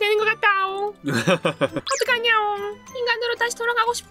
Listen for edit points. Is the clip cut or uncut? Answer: cut